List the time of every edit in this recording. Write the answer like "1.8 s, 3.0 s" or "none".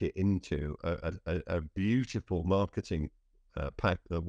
none